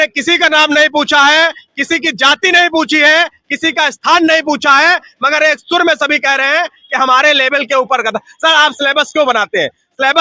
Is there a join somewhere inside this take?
no; 0 cuts

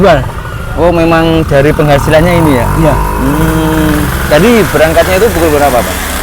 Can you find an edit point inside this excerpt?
no; 0 cuts

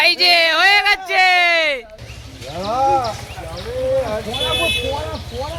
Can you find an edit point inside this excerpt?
no; 0 cuts

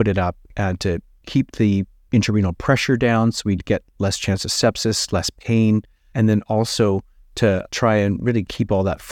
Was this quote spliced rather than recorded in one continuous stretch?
no; 0 cuts

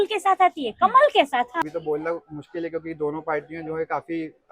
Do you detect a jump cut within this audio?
yes; 1 cut; at 1.6 s

